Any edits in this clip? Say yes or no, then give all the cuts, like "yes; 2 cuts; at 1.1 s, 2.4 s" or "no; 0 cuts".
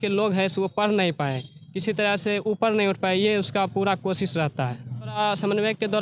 yes; 1 cut; at 5.0 s